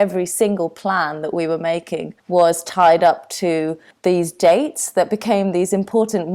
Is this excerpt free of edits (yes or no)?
yes